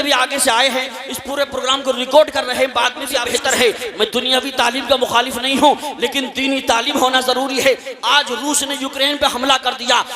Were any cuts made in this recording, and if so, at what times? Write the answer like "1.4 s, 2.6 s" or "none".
3.2 s